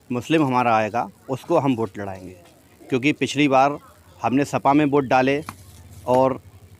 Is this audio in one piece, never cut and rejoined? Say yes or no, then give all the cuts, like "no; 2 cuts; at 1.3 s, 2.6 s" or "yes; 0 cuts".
yes; 0 cuts